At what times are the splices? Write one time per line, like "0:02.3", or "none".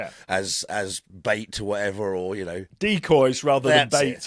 0:01.1
0:03.1